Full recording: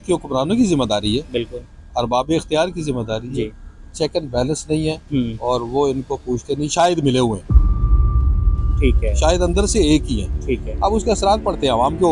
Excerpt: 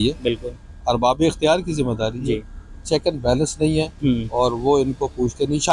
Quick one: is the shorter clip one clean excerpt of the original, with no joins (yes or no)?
yes